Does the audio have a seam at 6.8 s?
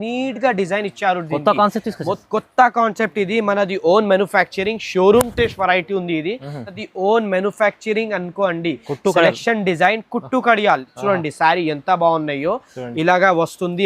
yes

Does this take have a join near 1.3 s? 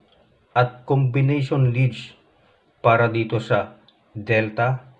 no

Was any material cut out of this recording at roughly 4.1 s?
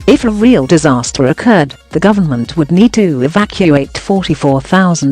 no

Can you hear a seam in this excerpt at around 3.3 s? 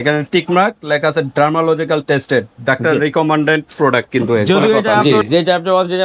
no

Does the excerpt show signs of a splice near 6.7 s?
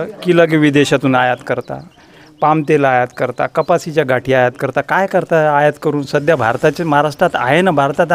no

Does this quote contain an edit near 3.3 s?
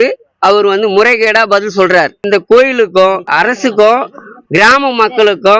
yes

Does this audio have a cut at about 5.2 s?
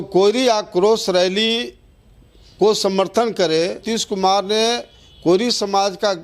no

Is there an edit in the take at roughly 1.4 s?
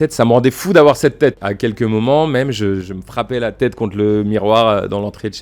yes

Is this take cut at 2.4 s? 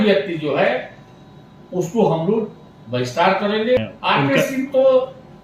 no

